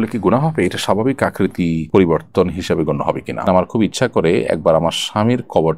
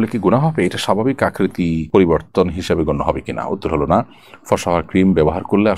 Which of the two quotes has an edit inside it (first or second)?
first